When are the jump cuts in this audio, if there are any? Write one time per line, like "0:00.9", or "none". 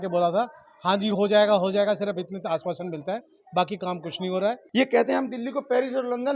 0:04.6